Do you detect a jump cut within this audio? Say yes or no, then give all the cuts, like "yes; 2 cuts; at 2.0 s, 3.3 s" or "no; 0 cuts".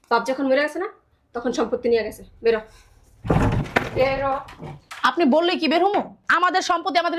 no; 0 cuts